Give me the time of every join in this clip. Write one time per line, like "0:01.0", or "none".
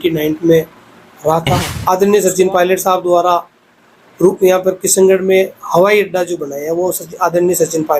0:01.7